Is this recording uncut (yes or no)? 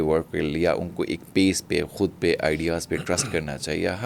yes